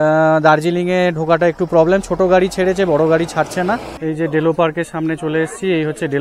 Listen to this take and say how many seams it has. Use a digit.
1